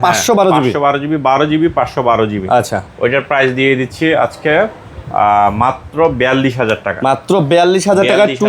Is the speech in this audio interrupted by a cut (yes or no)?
no